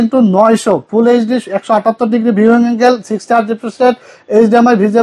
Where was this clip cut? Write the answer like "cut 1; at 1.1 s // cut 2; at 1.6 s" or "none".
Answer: none